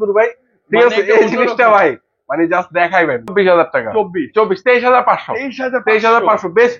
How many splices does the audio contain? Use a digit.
1